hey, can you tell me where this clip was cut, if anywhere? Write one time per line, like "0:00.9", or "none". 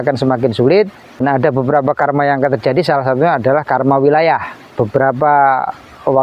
0:01.2
0:04.7